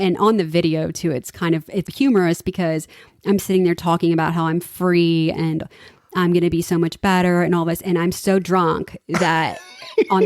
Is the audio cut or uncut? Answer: cut